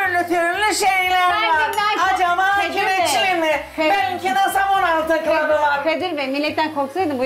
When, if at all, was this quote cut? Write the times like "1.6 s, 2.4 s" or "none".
none